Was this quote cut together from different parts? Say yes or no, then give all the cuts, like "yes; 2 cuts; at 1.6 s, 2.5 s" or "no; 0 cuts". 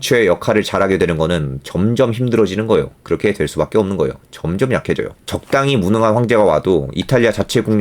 yes; 1 cut; at 5.2 s